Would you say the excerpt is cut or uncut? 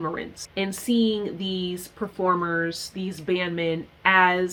uncut